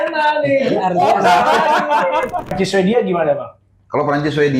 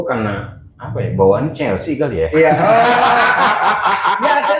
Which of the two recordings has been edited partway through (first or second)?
first